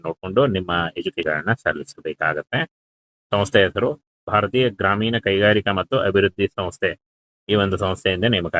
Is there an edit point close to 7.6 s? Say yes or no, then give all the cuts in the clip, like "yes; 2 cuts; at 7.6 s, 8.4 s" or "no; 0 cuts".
no; 1 cut; at 1.2 s